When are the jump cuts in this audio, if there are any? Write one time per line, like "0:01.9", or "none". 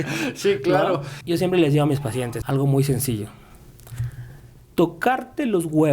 0:01.1
0:02.4